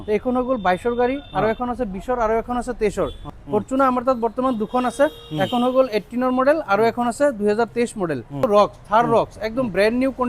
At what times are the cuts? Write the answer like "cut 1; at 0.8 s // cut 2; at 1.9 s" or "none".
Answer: cut 1; at 3.3 s // cut 2; at 8.4 s